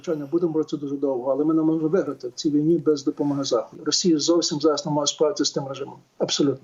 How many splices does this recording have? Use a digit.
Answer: 1